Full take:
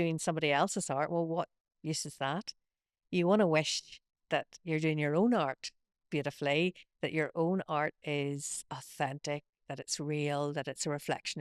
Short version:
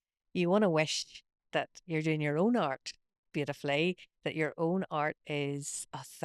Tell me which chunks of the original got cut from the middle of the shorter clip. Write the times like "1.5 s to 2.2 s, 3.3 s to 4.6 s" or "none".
none